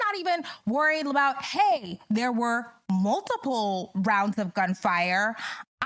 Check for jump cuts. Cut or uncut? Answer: uncut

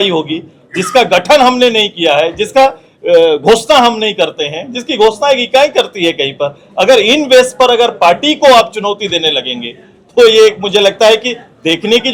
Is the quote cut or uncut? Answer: uncut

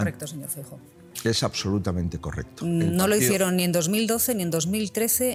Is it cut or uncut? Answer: uncut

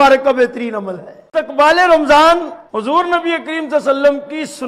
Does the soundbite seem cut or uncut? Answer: cut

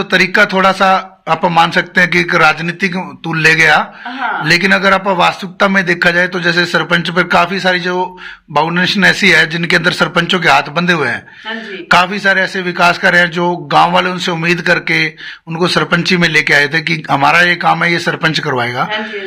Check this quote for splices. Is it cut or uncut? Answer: uncut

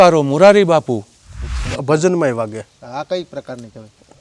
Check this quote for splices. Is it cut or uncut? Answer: cut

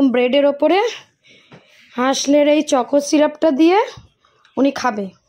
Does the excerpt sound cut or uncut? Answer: uncut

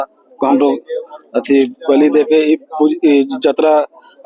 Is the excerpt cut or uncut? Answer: uncut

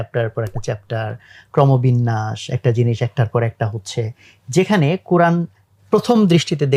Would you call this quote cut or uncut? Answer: uncut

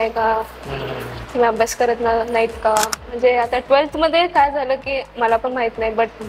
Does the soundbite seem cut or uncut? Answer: cut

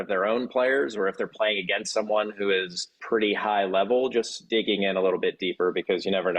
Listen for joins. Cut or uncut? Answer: cut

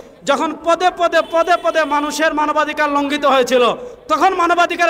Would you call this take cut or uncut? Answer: uncut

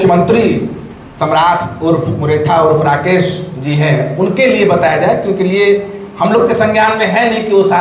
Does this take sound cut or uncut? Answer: uncut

